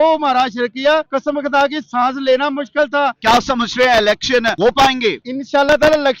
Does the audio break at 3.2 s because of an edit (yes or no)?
yes